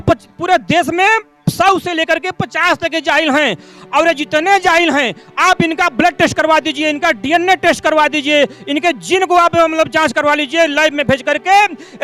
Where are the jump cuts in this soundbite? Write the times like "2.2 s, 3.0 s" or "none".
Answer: none